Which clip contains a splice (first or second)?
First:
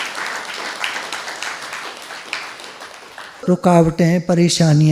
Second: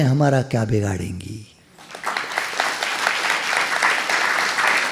first